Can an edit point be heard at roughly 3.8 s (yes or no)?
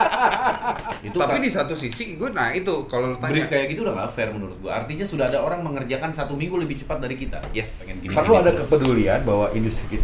no